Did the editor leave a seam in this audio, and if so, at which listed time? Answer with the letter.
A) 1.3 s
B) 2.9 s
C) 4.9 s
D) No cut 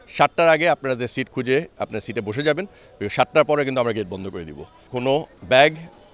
C